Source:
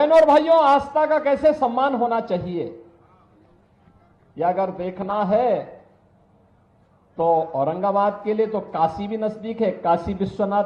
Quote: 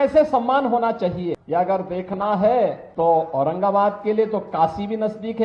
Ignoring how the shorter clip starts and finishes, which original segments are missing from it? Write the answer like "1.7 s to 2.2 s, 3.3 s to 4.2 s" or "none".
2.7 s to 4.3 s, 5.7 s to 7.0 s